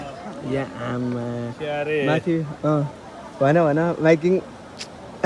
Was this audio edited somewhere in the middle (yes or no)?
no